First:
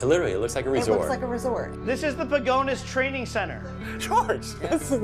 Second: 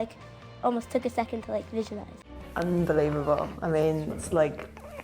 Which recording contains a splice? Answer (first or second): second